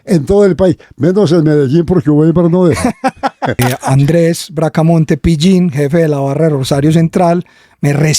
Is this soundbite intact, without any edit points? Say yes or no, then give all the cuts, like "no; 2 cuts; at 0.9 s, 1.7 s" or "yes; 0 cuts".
no; 1 cut; at 3.6 s